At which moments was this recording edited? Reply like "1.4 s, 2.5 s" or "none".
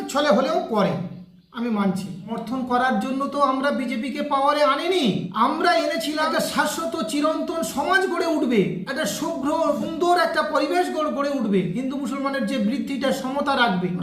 none